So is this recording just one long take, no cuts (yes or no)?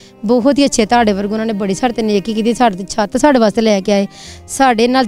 yes